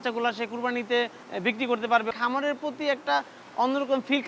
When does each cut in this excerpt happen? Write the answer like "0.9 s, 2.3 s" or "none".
1.2 s, 2.1 s